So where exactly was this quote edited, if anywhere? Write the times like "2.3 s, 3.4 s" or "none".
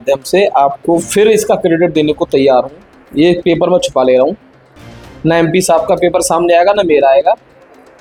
none